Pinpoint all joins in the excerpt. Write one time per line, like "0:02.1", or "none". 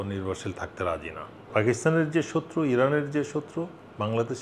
0:01.5